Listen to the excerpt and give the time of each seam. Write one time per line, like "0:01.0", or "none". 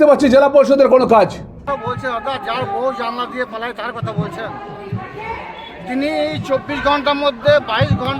0:01.6